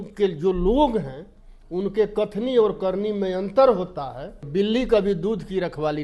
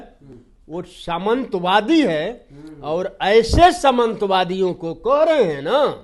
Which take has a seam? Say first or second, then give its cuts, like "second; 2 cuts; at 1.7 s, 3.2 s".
first; 1 cut; at 4.4 s